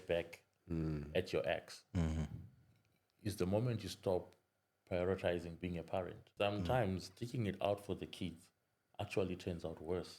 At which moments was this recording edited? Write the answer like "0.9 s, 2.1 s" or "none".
6.2 s